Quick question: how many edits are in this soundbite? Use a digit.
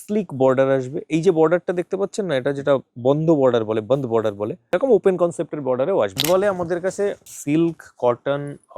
3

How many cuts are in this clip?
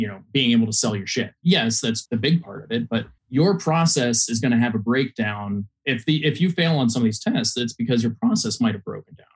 3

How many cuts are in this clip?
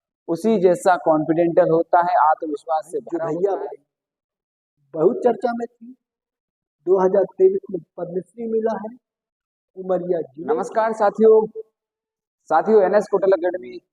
2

